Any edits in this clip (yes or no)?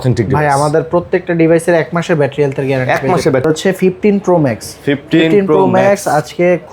yes